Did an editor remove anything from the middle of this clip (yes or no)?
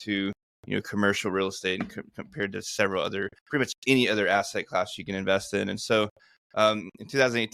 no